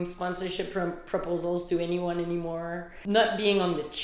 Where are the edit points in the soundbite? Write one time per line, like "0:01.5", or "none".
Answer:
0:02.9